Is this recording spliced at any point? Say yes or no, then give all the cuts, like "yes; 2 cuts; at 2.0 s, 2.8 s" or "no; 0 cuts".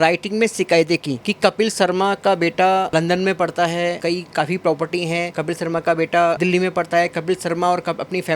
yes; 5 cuts; at 1.2 s, 2.9 s, 4.0 s, 5.3 s, 6.4 s